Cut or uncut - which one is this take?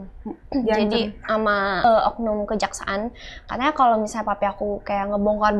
cut